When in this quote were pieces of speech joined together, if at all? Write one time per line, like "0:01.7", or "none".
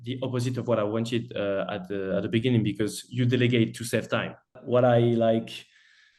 0:04.6